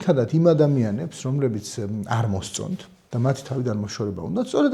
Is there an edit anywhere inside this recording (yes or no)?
yes